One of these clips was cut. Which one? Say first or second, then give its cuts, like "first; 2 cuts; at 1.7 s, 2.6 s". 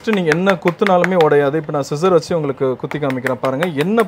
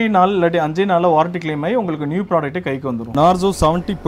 second; 1 cut; at 3.0 s